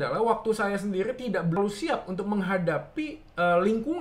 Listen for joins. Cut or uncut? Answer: cut